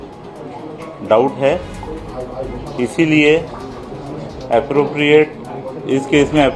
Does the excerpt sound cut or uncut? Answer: uncut